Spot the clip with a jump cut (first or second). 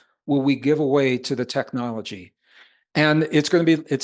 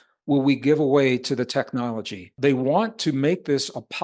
second